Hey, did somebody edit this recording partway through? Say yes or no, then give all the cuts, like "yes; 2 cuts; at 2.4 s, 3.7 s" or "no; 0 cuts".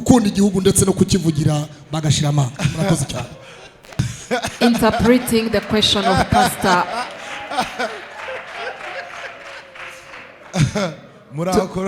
no; 0 cuts